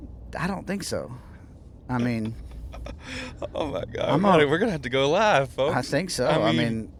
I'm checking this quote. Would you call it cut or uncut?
uncut